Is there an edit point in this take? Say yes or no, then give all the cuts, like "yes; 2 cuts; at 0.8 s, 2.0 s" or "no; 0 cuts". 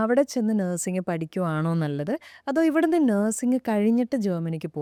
no; 0 cuts